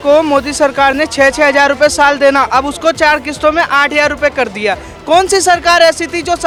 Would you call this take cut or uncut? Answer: uncut